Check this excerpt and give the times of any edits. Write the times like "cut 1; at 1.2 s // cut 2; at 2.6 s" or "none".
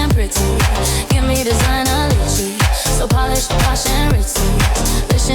none